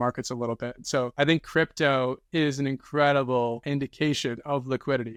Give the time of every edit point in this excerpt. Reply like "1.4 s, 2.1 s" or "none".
none